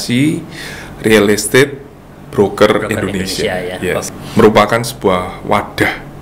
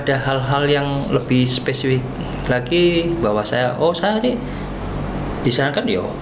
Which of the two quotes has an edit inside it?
first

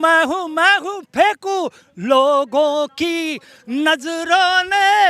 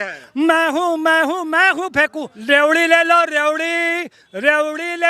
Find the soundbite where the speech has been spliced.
second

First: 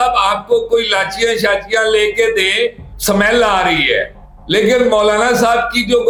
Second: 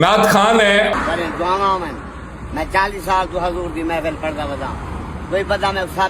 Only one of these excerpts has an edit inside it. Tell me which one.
second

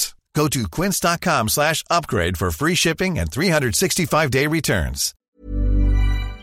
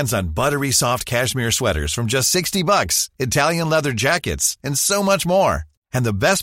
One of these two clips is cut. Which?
first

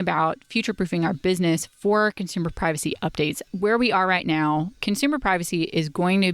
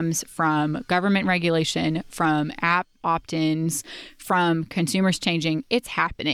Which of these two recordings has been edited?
first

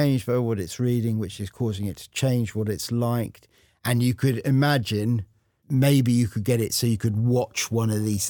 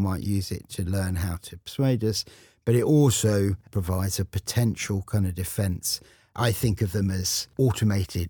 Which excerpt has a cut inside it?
second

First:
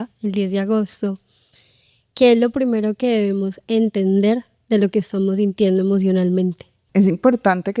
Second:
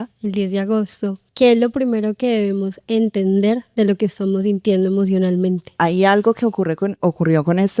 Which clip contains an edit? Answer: second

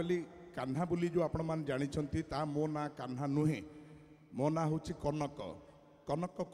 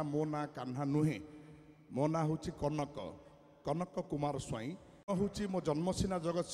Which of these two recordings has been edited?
second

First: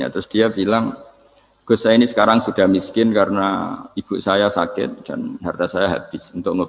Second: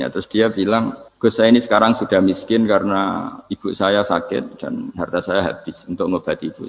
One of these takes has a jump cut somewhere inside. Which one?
second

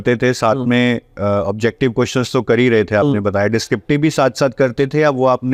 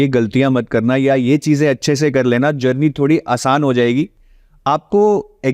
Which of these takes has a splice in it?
second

